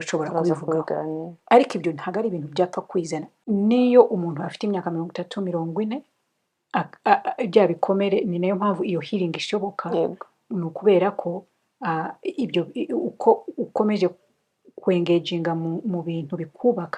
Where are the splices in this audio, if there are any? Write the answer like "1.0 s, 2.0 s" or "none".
3.3 s